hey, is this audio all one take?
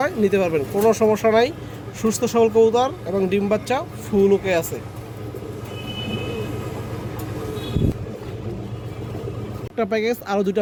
yes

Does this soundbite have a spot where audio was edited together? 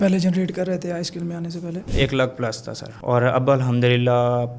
yes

